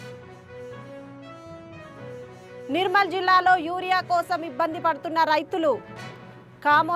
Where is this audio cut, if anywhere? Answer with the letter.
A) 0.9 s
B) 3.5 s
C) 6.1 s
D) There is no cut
A